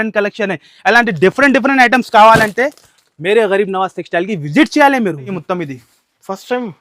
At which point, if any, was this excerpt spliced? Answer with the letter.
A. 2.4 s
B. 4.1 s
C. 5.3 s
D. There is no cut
C